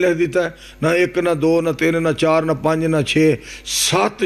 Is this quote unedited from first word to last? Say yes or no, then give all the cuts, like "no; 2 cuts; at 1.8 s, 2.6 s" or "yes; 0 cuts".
yes; 0 cuts